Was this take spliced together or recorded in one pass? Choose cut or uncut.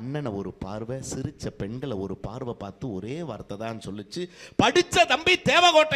uncut